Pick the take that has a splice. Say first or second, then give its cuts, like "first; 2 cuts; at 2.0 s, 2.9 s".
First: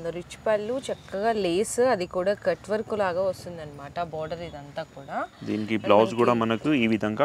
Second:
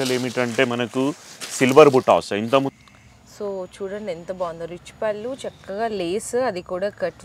second; 1 cut; at 2.7 s